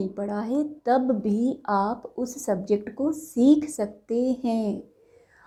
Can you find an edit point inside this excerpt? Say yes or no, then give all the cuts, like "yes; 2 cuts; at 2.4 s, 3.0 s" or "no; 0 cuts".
no; 0 cuts